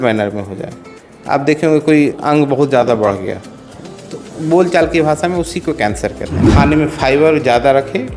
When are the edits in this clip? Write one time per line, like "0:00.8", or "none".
0:06.5